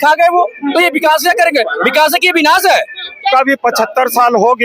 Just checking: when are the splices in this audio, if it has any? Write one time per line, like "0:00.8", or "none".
0:03.3